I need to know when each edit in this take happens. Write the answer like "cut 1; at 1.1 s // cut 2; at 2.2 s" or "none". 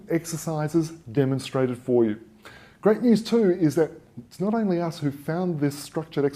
cut 1; at 3.6 s